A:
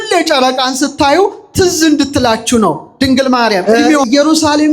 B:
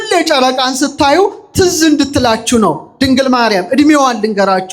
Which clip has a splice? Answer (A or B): A